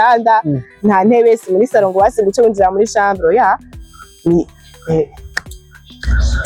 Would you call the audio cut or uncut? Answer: uncut